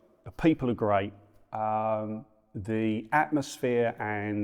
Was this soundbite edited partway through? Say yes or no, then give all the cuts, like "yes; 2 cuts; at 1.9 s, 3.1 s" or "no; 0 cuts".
no; 0 cuts